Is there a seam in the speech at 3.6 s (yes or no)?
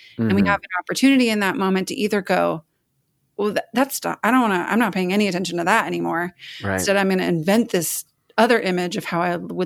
no